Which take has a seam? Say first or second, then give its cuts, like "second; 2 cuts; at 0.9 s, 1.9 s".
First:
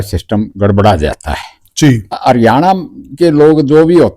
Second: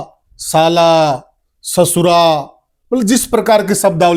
first; 1 cut; at 2.2 s